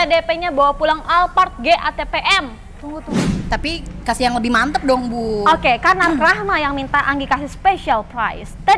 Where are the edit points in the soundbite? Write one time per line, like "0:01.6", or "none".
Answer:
0:03.2